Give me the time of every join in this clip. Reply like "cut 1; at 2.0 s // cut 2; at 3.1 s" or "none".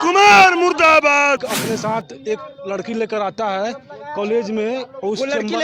cut 1; at 1.5 s

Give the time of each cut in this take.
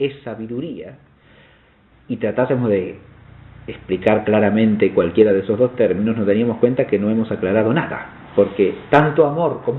cut 1; at 4.5 s

